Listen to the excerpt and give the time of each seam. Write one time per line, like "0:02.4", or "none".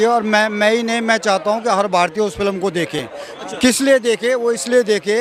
none